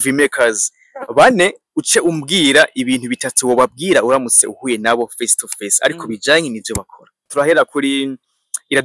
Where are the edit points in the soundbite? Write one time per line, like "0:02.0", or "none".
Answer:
0:07.2